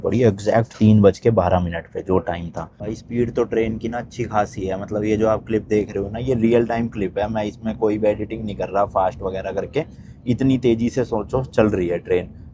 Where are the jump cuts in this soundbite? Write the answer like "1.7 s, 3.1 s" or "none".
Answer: 2.8 s

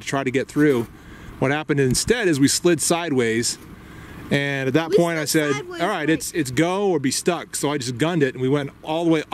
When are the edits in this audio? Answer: none

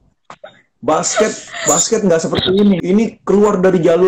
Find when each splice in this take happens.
2.8 s

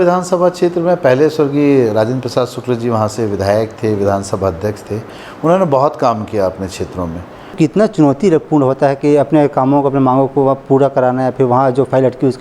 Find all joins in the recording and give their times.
7.6 s

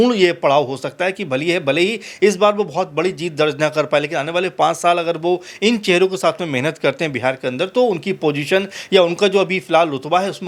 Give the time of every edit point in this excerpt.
none

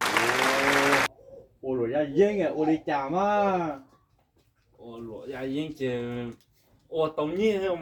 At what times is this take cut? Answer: none

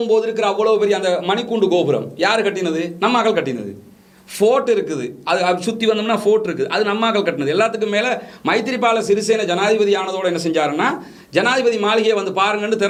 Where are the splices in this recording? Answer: none

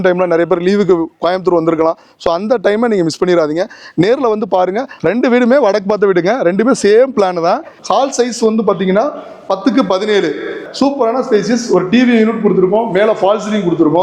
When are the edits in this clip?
4.9 s, 7.7 s, 10.6 s

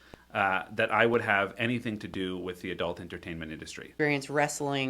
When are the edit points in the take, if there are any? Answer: 3.9 s

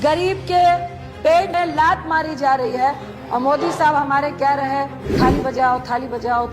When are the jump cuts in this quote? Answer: 1.5 s, 3.1 s, 5.0 s

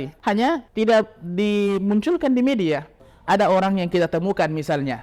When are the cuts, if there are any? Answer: 2.9 s

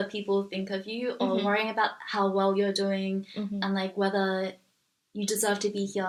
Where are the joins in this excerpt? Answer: none

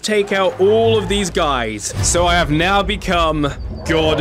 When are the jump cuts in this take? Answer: 1.9 s

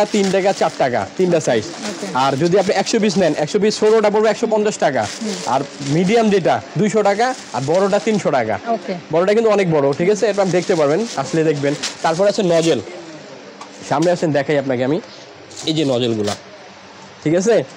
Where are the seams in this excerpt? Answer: none

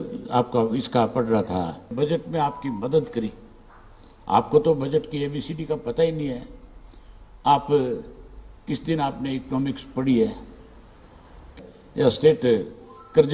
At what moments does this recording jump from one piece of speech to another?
1.9 s, 11.5 s

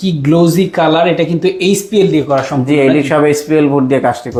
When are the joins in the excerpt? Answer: none

